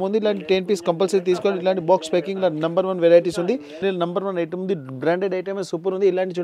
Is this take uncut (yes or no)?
no